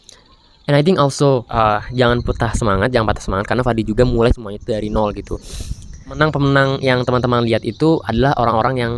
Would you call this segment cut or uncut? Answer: cut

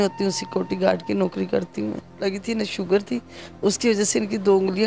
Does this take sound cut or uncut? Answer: cut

